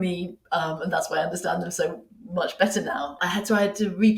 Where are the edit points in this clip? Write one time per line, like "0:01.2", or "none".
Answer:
0:03.2